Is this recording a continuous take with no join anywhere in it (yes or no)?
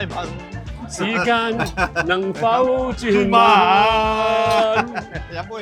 yes